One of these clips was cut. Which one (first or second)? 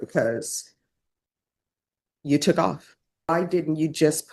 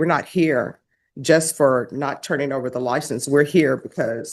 first